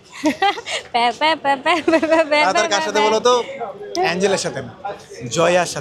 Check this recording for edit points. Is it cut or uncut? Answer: uncut